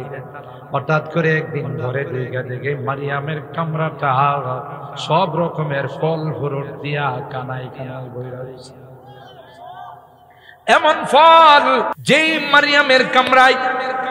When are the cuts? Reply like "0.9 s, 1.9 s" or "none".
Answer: 11.9 s